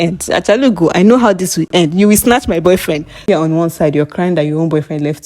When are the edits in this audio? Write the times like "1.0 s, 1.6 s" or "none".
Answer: 1.7 s, 3.2 s